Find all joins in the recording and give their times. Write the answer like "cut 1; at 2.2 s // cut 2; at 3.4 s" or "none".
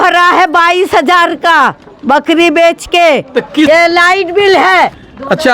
cut 1; at 3.7 s